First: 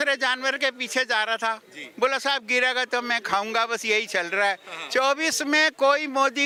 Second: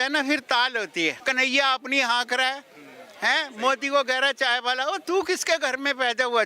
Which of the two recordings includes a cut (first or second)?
second